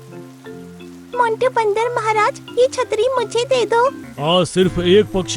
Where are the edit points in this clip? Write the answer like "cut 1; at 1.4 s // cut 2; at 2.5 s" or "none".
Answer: cut 1; at 4.1 s